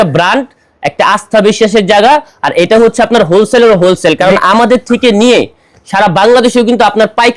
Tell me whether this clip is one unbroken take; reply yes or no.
yes